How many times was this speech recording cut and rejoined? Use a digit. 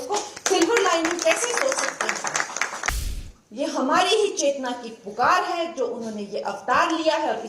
1